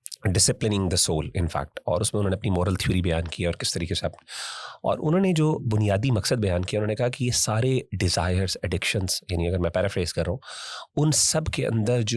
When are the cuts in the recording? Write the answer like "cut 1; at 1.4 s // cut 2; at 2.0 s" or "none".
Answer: none